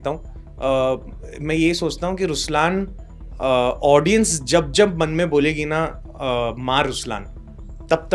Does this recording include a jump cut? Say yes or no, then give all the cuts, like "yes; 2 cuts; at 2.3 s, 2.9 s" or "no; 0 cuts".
no; 0 cuts